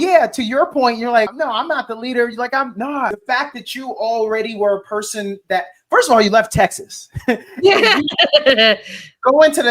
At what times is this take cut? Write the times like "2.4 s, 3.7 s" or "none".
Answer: 1.3 s, 3.2 s